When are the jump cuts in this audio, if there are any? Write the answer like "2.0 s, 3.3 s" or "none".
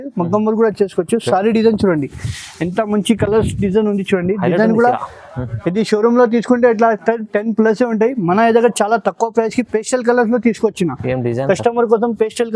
none